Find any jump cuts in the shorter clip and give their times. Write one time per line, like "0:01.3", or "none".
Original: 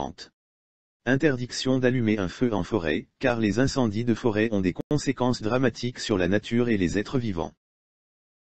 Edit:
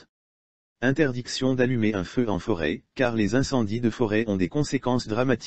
0:04.5